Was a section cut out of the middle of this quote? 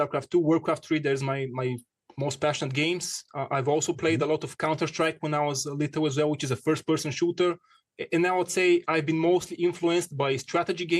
no; 0 cuts

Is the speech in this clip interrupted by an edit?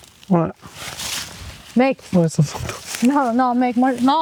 no; 0 cuts

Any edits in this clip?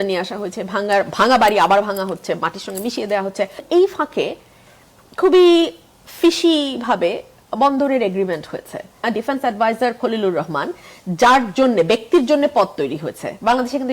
yes; 2 cuts; at 3.6 s, 9.0 s

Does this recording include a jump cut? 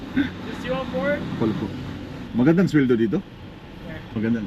yes; 1 cut; at 2.2 s

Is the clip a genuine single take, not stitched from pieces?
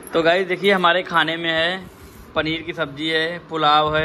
yes; 0 cuts

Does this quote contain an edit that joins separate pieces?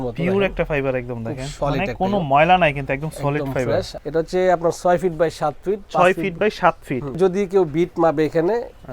yes; 3 cuts; at 1.5 s, 3.9 s, 7.2 s

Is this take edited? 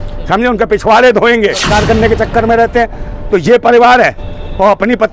yes; 1 cut; at 1.7 s

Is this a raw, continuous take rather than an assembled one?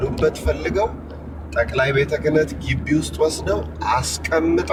yes; 0 cuts

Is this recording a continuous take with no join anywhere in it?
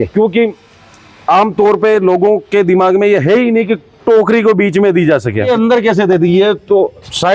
no; 1 cut; at 5.5 s

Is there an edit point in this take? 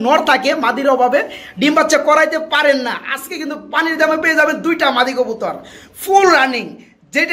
no; 0 cuts

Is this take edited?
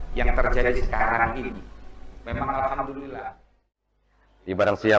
yes; 1 cut; at 3.6 s

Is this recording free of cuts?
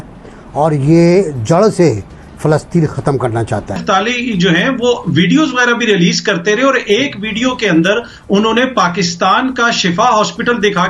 no; 1 cut; at 3.8 s

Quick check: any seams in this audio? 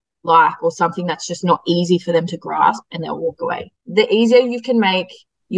no; 0 cuts

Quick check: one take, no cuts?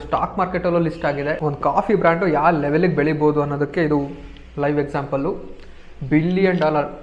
no; 1 cut; at 1.4 s

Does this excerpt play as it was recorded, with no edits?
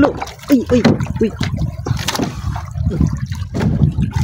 yes; 0 cuts

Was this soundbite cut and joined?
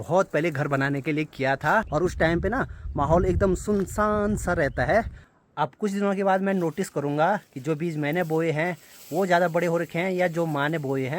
yes; 2 cuts; at 1.9 s, 5.2 s

